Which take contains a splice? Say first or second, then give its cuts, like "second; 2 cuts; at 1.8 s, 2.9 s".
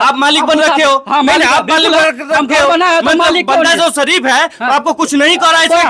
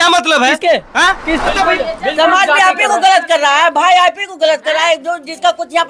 second; 1 cut; at 1.5 s